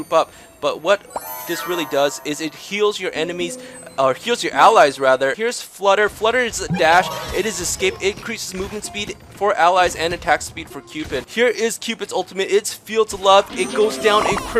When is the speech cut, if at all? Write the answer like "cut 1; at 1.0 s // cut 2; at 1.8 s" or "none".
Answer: cut 1; at 5.4 s // cut 2; at 11.3 s